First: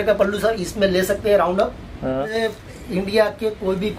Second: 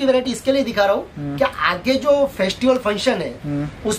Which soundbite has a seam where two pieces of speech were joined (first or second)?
first